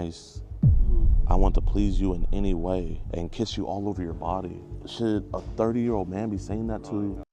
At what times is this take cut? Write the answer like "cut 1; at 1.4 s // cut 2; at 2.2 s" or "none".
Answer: none